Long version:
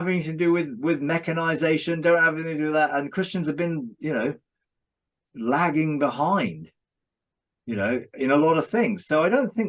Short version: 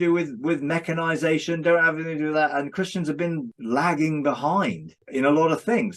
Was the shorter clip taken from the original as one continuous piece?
no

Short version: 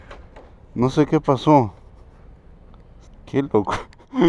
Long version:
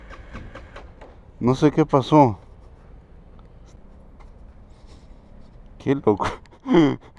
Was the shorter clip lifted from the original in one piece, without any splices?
no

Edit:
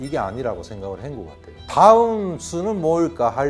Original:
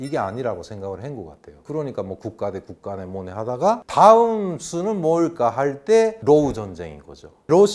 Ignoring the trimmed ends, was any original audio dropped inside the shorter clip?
yes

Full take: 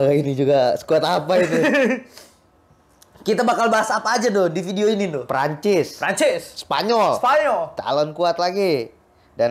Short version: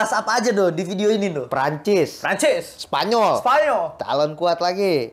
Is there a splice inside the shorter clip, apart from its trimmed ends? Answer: no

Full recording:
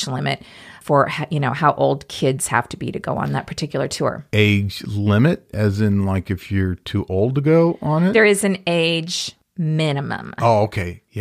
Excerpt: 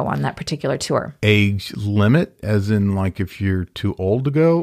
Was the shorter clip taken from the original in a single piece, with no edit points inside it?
yes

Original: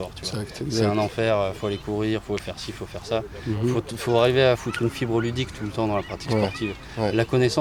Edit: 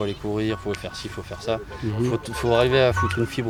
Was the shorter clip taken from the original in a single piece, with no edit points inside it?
yes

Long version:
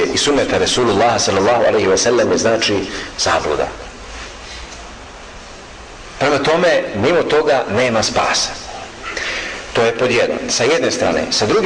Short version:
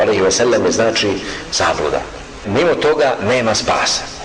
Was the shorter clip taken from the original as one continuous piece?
no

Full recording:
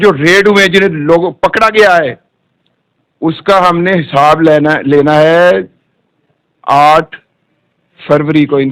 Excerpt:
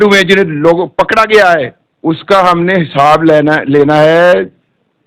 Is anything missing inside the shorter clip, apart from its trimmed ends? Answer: yes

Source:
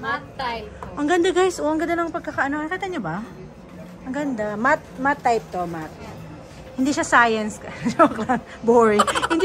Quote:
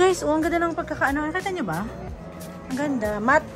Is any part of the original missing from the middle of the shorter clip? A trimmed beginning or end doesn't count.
no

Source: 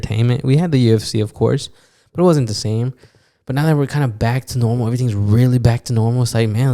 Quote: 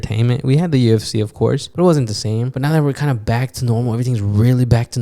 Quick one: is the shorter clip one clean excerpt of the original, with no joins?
no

